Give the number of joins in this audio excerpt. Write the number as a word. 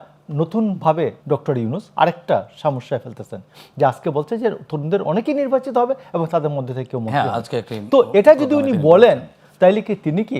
one